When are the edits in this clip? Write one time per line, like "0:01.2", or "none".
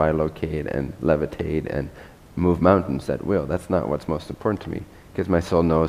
0:04.9